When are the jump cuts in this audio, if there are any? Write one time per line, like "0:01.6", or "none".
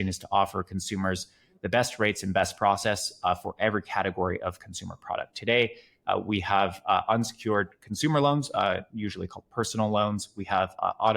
none